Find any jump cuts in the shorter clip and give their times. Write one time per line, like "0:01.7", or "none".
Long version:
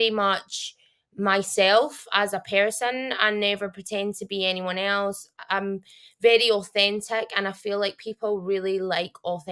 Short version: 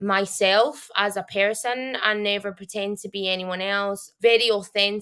0:04.1